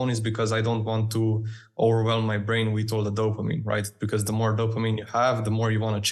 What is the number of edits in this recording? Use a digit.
0